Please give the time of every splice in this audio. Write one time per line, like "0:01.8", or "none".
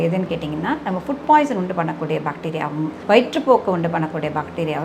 none